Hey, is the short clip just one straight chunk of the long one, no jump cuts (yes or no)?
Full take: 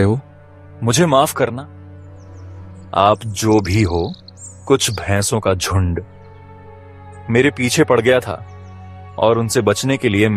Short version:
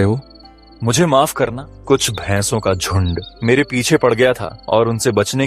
no